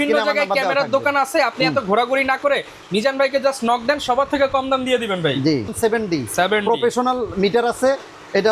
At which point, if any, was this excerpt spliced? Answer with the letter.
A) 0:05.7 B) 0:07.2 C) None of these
A